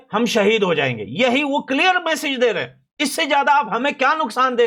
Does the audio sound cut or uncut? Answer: uncut